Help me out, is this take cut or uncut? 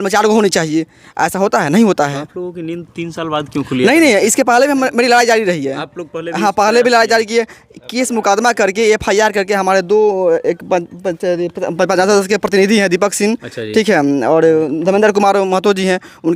uncut